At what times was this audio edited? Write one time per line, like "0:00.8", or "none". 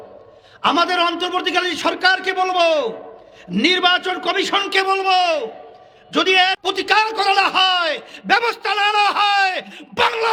none